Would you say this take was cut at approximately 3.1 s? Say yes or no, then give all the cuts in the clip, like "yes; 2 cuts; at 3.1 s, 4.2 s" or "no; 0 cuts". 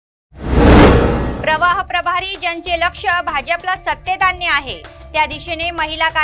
no; 1 cut; at 1.3 s